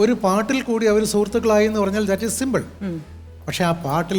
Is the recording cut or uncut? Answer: uncut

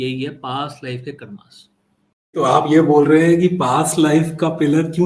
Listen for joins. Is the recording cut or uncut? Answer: cut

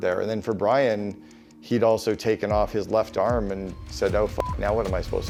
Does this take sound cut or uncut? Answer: uncut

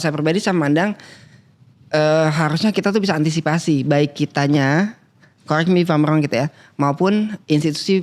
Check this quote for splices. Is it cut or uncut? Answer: uncut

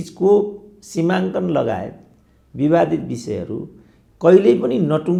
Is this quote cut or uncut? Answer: uncut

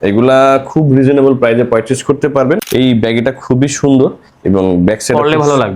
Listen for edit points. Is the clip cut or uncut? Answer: cut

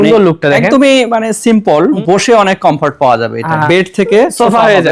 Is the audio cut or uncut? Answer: cut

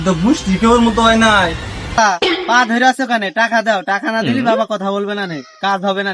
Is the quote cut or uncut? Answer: cut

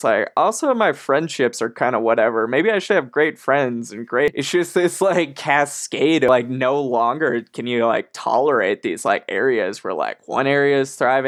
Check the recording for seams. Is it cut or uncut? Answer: cut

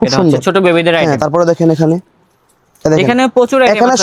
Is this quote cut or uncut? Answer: uncut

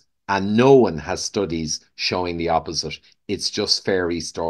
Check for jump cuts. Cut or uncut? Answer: uncut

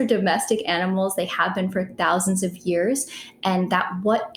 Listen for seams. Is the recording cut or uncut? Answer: uncut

